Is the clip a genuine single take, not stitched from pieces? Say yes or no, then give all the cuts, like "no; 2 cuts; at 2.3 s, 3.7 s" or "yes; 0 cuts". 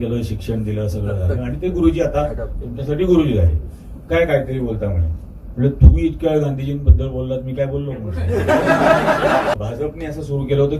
no; 1 cut; at 9.5 s